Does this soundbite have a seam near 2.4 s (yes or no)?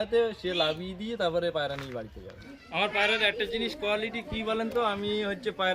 no